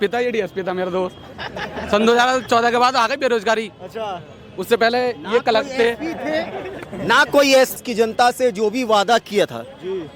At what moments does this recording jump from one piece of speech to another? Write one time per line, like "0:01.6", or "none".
0:07.8